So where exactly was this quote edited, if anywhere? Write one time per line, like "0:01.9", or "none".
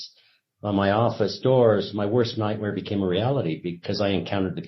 none